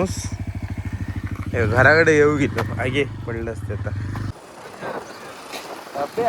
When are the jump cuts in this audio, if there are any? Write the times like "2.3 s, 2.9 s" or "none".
4.3 s